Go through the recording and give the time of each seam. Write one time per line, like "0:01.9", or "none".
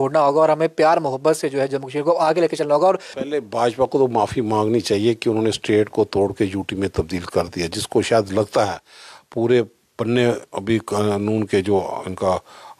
0:03.1